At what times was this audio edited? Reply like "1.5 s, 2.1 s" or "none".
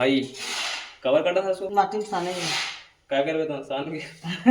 1.7 s